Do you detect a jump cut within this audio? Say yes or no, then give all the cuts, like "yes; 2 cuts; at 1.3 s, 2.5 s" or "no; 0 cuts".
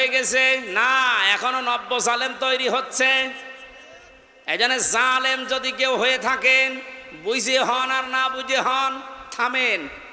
no; 0 cuts